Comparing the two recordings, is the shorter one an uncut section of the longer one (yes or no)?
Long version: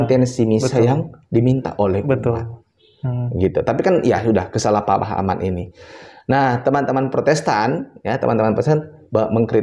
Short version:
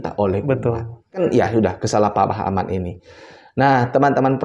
no